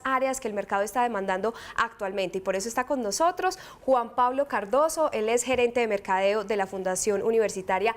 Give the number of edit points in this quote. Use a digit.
1